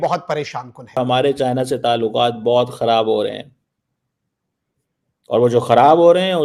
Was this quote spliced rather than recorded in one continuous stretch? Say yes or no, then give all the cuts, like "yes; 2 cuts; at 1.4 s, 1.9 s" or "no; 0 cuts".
yes; 1 cut; at 1.0 s